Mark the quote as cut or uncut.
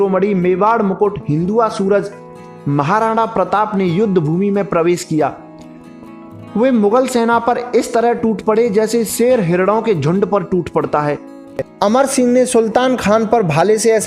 cut